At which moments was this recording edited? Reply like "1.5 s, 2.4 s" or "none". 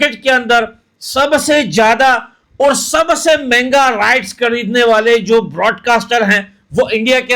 none